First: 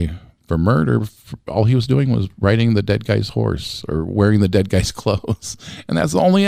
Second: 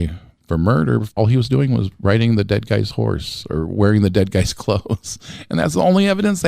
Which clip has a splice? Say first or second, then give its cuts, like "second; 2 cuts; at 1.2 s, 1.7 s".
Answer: second; 1 cut; at 1.1 s